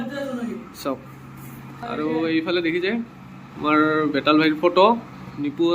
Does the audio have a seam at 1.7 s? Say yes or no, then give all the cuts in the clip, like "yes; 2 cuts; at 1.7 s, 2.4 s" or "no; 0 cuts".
yes; 1 cut; at 1.7 s